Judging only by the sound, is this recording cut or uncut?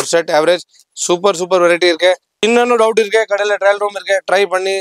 cut